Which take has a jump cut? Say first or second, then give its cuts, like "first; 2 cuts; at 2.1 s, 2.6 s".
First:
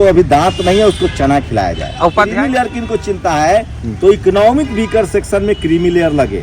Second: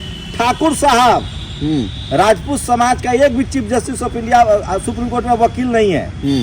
first; 1 cut; at 2.2 s